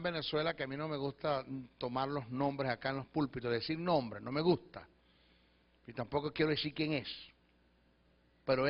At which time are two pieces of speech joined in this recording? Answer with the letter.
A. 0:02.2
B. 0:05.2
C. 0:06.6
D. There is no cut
D